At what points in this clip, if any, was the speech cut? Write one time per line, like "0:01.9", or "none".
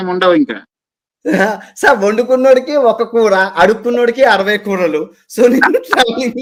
none